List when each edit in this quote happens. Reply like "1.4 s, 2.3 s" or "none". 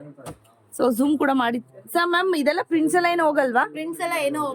none